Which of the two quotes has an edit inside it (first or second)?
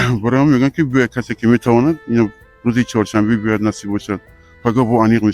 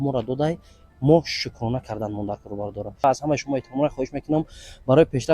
second